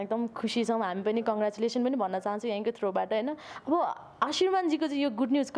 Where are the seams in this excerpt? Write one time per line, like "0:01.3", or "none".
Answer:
none